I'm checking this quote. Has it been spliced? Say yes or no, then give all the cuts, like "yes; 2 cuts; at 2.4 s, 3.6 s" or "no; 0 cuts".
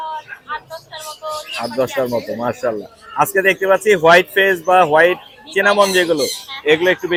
no; 0 cuts